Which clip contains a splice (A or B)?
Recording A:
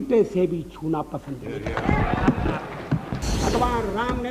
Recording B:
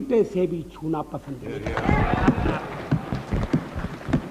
A